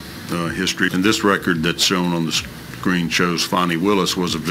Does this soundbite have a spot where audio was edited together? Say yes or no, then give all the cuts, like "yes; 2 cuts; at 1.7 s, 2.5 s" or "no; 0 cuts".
yes; 1 cut; at 0.9 s